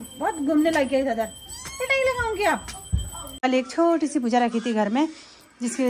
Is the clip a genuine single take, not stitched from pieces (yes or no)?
no